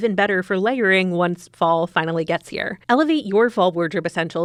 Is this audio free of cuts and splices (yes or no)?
yes